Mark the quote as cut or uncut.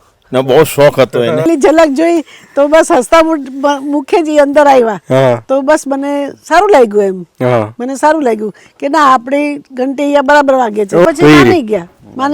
cut